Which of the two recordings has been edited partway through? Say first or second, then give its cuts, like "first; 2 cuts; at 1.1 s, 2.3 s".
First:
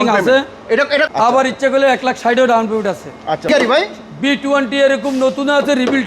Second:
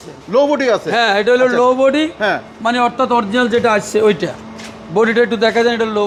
first; 2 cuts; at 1.1 s, 3.5 s